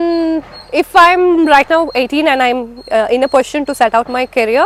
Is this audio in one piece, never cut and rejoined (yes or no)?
yes